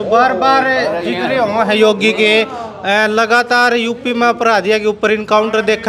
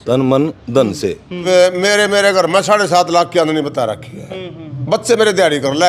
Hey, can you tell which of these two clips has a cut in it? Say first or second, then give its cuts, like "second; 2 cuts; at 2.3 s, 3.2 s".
second; 1 cut; at 1.5 s